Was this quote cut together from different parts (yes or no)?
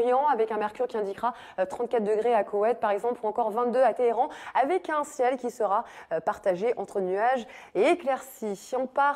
no